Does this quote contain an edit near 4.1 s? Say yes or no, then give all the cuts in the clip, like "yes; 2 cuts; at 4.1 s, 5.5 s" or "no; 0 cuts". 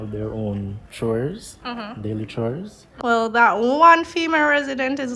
no; 1 cut; at 2.8 s